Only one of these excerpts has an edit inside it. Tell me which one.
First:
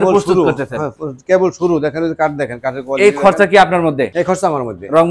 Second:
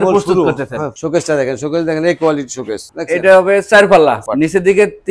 second; 3 cuts; at 0.9 s, 2.8 s, 4.2 s

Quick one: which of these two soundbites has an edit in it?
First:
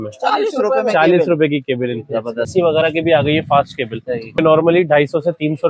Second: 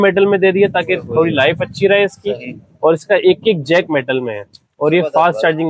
first; 2 cuts; at 2.5 s, 4.4 s

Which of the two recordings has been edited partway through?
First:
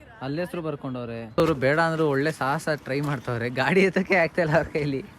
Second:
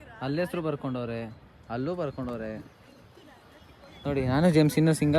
first; 1 cut; at 1.2 s

